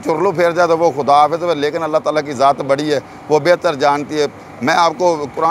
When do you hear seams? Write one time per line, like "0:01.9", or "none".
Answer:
none